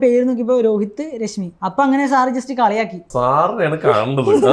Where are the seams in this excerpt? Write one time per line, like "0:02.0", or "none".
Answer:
0:01.5
0:03.0